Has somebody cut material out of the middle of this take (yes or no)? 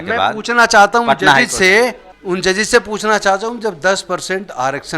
yes